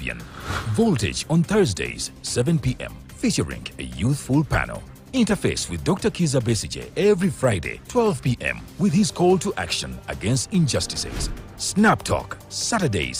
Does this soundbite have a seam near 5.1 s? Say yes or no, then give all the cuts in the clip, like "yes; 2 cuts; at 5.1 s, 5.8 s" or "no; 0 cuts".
no; 0 cuts